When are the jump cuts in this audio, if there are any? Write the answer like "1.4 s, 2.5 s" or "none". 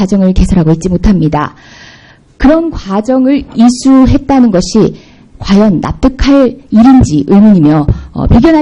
none